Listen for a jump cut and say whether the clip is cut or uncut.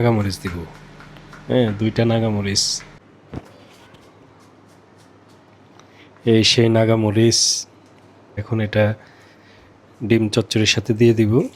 cut